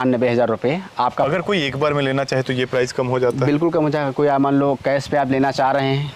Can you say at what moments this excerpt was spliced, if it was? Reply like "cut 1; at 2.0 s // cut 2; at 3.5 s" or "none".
cut 1; at 1.3 s